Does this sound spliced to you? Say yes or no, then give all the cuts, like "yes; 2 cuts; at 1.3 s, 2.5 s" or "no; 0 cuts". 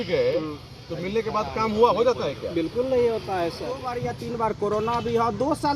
yes; 1 cut; at 4.0 s